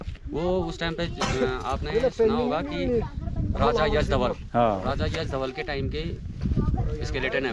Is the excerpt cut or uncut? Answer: uncut